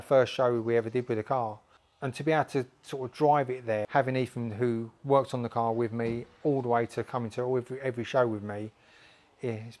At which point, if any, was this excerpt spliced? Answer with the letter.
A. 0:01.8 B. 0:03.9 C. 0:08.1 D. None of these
B